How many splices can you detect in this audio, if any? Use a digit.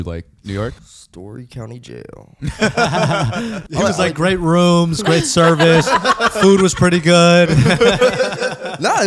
2